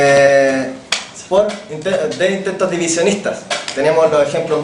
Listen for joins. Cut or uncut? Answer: cut